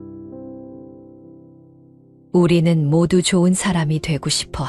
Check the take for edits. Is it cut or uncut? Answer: uncut